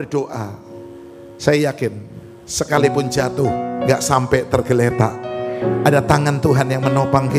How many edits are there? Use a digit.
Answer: 0